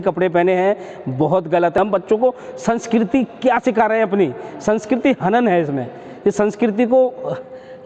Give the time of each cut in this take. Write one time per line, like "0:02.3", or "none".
0:01.8